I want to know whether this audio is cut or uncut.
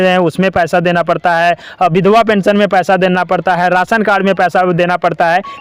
uncut